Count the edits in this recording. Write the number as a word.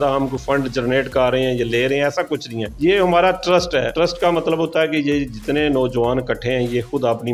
zero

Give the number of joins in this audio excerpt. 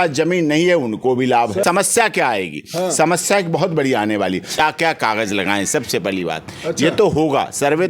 two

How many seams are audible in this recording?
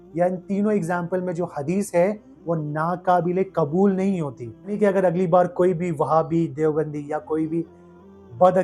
one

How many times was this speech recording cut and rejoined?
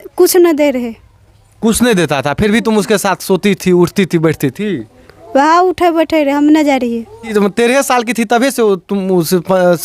one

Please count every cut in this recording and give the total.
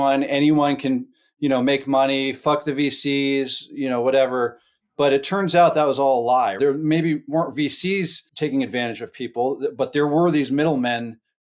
two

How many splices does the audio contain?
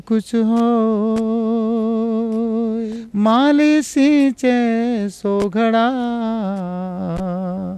one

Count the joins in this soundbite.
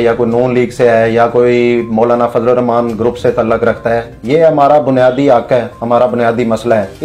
zero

